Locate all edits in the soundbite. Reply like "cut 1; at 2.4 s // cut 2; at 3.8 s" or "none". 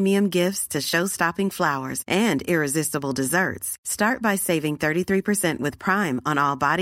none

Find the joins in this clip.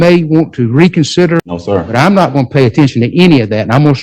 cut 1; at 1.5 s

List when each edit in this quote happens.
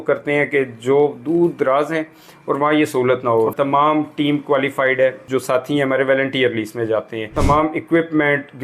cut 1; at 3.5 s // cut 2; at 5.2 s // cut 3; at 7.3 s

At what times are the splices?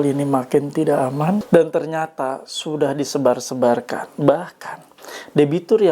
cut 1; at 1.4 s

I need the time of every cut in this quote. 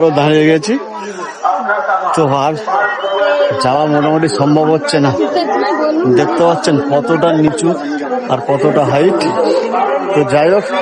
none

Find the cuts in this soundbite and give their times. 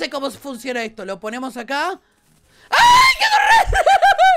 none

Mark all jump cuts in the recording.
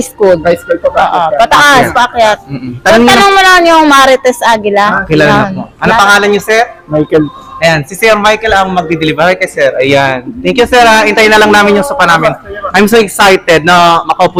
none

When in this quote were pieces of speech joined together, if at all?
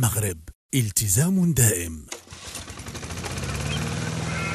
cut 1; at 2.0 s

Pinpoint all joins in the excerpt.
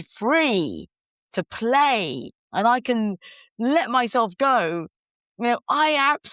none

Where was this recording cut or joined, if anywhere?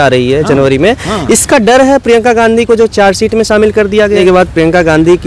cut 1; at 4.2 s

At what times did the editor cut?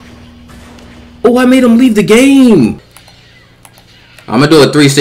cut 1; at 2.8 s

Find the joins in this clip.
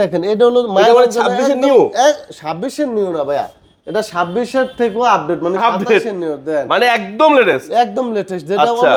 none

